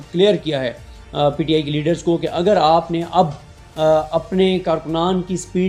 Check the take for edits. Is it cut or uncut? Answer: uncut